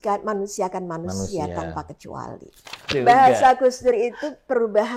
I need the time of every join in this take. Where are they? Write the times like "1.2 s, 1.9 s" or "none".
2.9 s